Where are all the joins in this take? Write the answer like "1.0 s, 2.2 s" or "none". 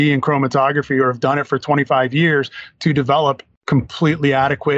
3.5 s